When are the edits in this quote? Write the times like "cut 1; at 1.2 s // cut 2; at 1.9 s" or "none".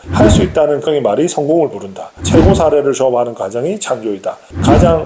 cut 1; at 2.2 s